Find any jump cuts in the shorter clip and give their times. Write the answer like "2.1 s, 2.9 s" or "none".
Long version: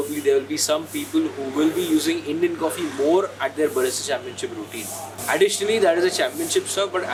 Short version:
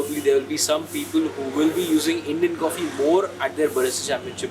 none